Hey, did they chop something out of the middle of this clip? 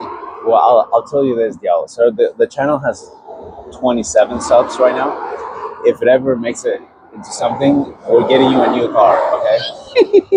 no; 0 cuts

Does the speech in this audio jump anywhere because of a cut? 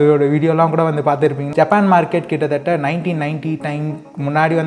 yes; 1 cut; at 1.4 s

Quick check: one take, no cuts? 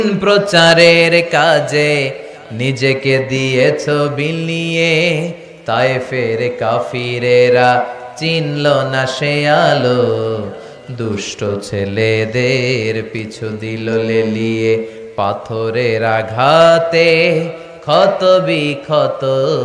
yes; 0 cuts

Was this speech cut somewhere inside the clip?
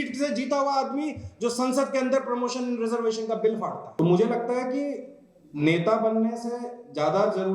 yes; 1 cut; at 3.8 s

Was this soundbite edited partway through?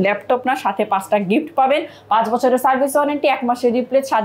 no; 0 cuts

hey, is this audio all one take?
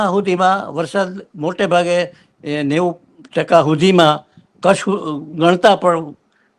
yes; 0 cuts

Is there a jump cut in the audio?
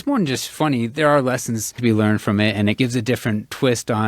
yes; 2 cuts; at 1.8 s, 2.8 s

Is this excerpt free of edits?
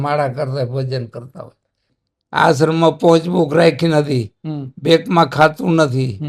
no; 1 cut; at 1.9 s

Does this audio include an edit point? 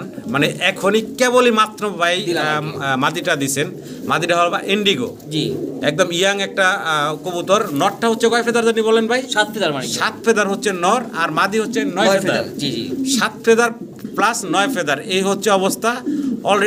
no; 0 cuts

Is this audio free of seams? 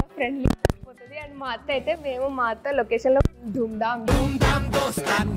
yes; 0 cuts

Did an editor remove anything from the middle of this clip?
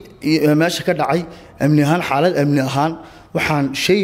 no; 0 cuts

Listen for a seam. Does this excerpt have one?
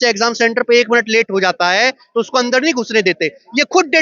no; 0 cuts

